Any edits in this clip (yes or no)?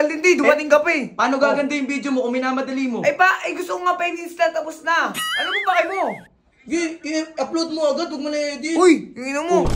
no